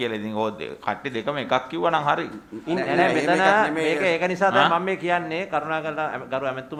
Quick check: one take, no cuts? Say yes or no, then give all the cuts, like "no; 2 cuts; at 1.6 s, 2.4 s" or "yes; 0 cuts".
yes; 0 cuts